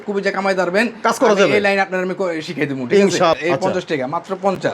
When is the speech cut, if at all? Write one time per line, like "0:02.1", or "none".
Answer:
0:03.3